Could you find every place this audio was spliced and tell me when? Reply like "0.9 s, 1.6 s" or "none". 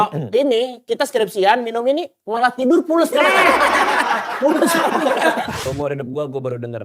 5.6 s